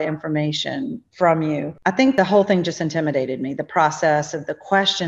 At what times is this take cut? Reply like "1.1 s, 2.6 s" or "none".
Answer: 1.0 s, 2.1 s